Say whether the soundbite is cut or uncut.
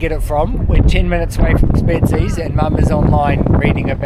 uncut